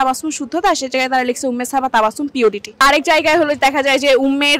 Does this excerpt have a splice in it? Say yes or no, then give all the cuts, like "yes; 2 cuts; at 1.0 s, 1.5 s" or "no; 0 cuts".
yes; 1 cut; at 2.8 s